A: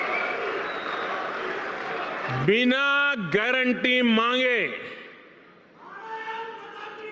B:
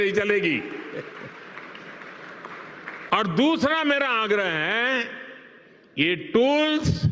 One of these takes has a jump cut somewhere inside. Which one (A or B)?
B